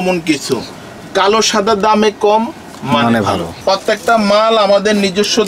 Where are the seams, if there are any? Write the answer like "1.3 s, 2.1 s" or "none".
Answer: 3.5 s